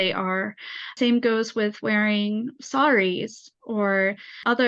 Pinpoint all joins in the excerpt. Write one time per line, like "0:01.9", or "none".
0:00.9